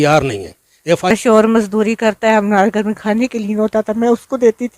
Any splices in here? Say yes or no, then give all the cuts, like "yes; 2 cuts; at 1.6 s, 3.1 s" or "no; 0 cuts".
yes; 1 cut; at 1.1 s